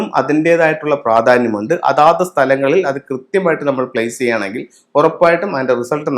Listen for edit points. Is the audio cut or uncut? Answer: uncut